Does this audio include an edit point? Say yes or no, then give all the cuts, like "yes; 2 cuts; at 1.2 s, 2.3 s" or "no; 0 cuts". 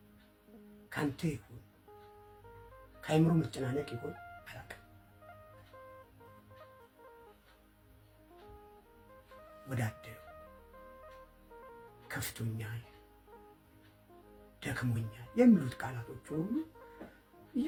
no; 0 cuts